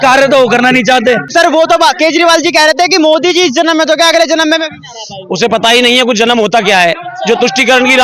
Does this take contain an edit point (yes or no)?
yes